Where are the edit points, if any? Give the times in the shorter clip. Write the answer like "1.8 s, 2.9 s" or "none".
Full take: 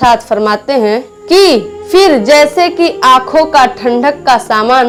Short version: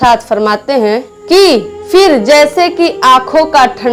none